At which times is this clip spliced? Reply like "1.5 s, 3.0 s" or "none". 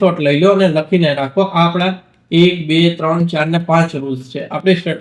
none